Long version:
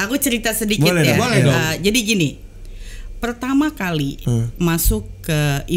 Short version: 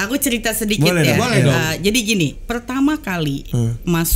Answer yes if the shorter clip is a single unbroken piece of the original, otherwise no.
no